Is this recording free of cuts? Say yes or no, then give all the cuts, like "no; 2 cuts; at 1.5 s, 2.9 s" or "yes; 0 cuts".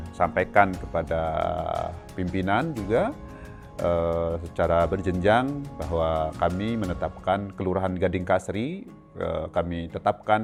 yes; 0 cuts